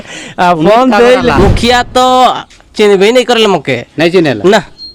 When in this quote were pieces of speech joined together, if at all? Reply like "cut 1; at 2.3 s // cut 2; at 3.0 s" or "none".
cut 1; at 1.4 s

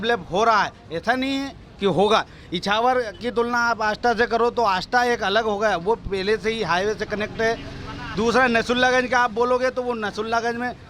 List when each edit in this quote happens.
none

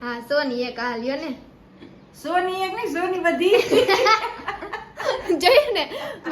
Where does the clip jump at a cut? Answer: cut 1; at 3.9 s

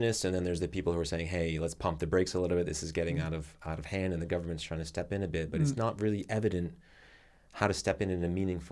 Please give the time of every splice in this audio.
none

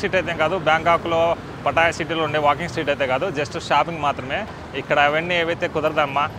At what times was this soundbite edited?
none

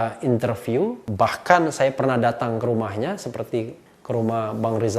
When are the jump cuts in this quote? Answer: cut 1; at 1.0 s

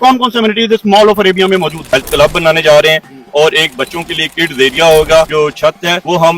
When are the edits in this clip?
cut 1; at 1.8 s // cut 2; at 5.6 s

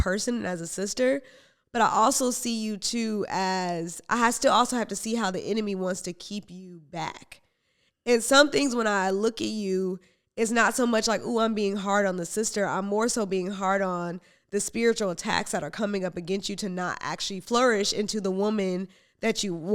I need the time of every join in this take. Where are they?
cut 1; at 17.4 s

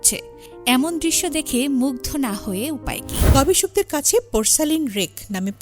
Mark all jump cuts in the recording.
cut 1; at 3.3 s

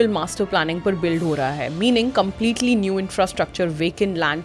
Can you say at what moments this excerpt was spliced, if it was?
none

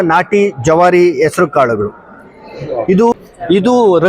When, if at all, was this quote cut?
cut 1; at 3.1 s

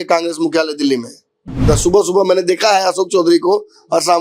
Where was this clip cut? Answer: cut 1; at 1.6 s

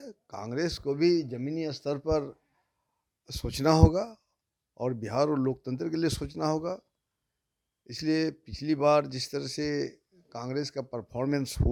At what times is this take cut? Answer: none

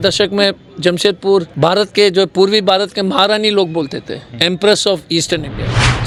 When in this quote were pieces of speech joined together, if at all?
none

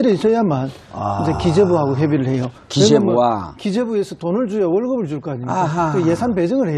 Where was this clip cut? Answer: cut 1; at 4.3 s

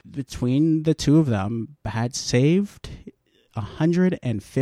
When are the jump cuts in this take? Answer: none

